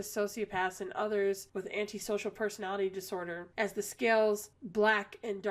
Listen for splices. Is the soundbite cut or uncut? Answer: uncut